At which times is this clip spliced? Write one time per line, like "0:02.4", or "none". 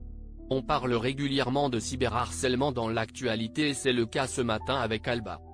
none